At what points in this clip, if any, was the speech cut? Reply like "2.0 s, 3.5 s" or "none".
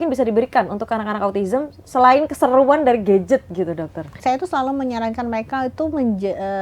4.1 s